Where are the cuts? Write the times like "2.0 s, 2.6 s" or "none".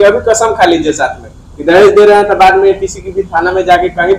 none